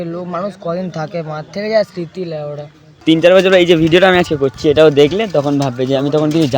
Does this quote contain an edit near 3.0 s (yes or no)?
yes